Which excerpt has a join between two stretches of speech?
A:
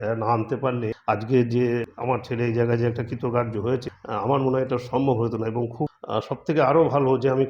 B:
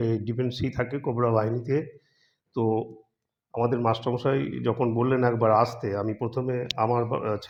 A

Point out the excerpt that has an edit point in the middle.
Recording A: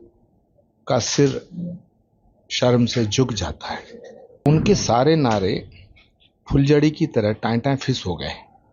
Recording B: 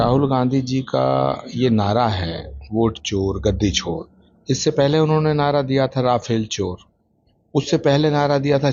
A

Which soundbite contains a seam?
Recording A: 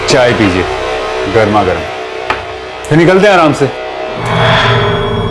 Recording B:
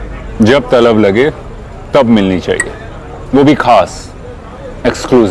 A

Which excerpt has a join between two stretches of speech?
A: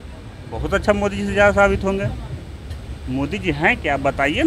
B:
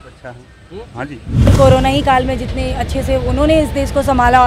B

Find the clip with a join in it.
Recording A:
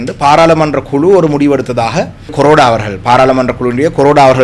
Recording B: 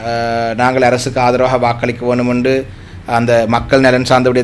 A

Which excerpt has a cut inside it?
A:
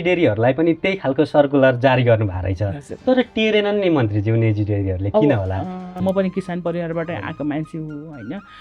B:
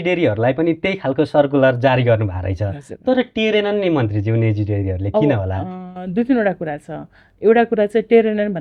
A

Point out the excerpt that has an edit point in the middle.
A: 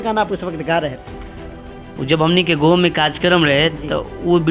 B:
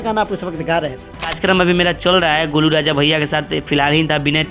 B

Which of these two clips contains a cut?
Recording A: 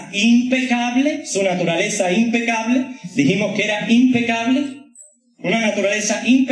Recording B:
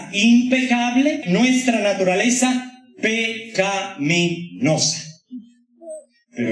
B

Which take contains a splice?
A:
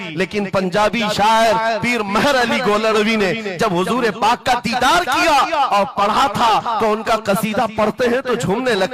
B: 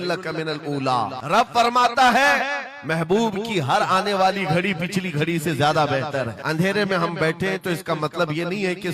B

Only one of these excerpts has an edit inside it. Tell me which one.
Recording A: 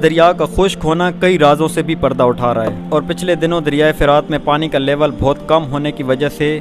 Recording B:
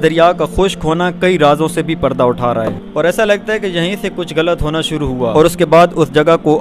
B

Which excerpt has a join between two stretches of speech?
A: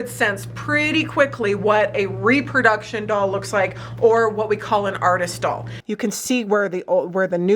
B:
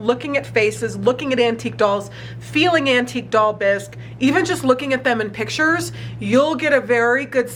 A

